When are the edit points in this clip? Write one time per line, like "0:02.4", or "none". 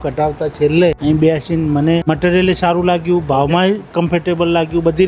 0:01.0
0:02.0

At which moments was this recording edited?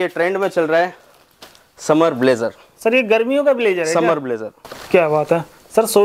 0:04.5

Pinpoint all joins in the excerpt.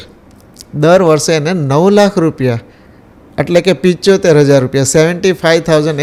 none

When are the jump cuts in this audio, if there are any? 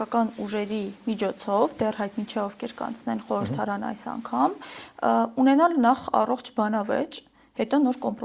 none

